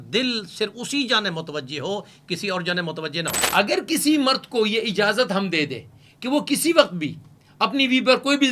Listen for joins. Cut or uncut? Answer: cut